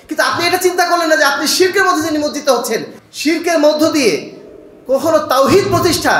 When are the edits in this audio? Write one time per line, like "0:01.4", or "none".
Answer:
0:02.9